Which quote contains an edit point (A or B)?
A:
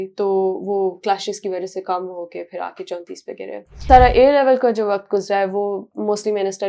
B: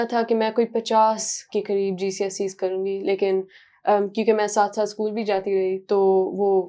A